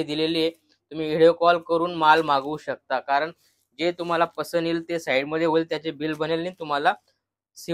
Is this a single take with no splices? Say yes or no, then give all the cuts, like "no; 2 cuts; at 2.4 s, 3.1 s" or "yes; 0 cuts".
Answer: yes; 0 cuts